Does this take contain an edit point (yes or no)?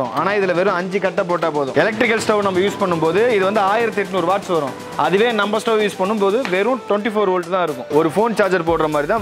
no